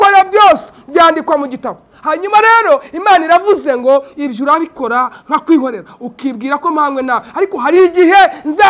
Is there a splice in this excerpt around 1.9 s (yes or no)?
yes